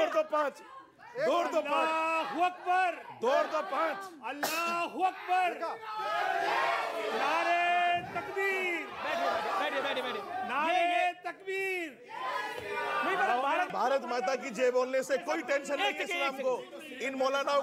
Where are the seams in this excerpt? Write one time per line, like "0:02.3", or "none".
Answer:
0:13.7